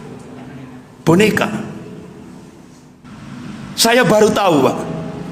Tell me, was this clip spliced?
yes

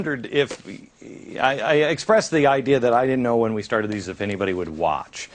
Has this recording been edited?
yes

